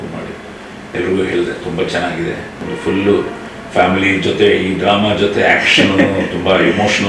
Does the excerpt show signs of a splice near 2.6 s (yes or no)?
yes